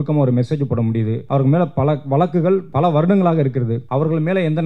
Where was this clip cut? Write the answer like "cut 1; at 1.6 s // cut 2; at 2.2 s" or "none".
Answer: cut 1; at 1.2 s // cut 2; at 2.7 s // cut 3; at 3.8 s